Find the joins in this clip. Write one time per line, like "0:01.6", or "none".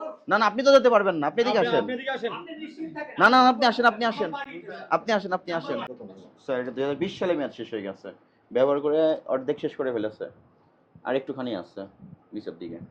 0:05.9